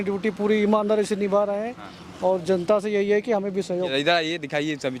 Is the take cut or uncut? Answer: cut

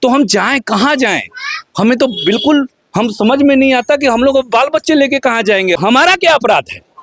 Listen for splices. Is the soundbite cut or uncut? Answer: cut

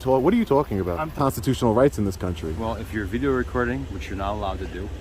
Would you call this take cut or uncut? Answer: cut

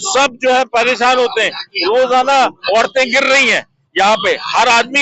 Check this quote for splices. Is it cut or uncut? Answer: uncut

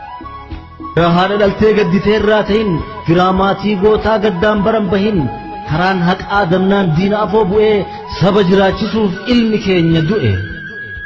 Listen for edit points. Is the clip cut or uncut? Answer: cut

